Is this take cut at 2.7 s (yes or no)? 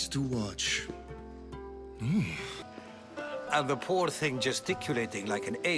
yes